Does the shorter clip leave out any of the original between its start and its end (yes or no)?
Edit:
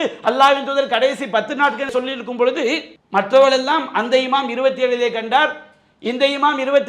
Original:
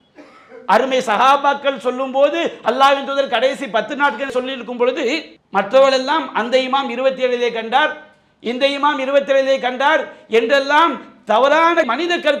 no